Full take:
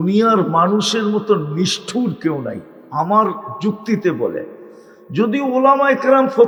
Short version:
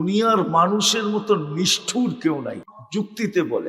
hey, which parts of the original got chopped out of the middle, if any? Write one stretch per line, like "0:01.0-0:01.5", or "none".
0:02.8-0:03.5